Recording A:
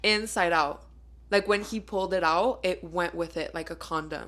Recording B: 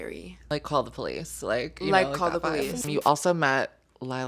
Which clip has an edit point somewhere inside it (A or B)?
B